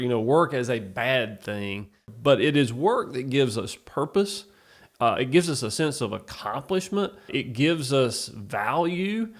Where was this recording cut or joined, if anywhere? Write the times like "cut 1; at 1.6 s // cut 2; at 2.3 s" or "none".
cut 1; at 2.1 s // cut 2; at 7.3 s